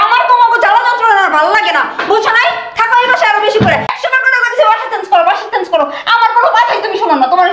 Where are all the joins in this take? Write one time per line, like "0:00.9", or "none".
0:03.9